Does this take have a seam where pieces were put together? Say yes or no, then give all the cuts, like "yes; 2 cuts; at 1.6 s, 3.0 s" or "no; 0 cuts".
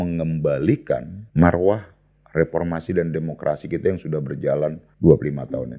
yes; 2 cuts; at 1.2 s, 4.8 s